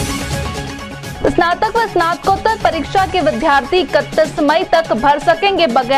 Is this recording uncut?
no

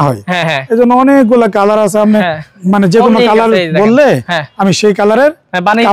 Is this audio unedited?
yes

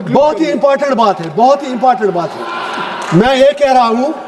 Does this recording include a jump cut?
no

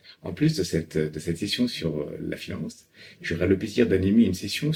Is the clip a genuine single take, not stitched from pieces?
yes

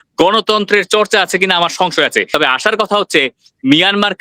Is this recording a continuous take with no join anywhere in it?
no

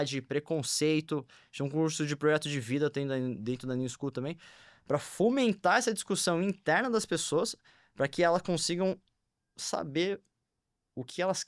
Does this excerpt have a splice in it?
no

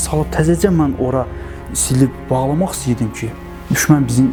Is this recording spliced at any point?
no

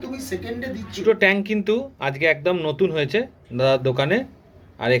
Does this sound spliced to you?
yes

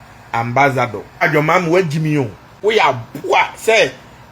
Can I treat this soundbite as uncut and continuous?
no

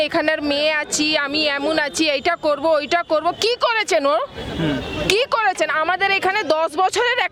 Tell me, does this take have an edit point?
no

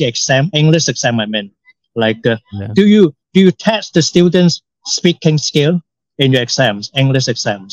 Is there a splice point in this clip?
no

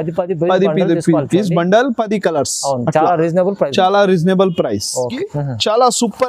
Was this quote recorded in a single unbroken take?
no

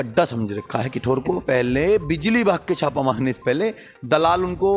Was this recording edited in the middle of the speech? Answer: yes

